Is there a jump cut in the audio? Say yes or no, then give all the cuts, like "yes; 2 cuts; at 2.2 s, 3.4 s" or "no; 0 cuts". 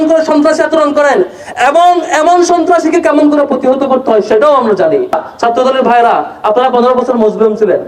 yes; 1 cut; at 5.2 s